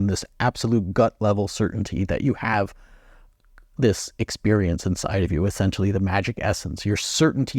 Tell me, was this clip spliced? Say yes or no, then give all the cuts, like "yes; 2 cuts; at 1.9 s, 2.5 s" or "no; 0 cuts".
no; 0 cuts